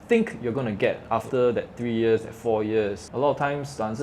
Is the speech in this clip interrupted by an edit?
yes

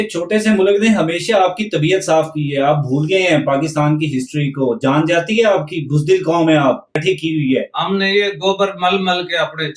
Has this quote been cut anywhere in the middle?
yes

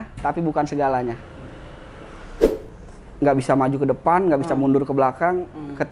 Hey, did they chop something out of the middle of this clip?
yes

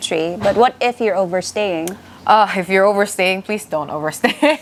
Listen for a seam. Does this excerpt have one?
no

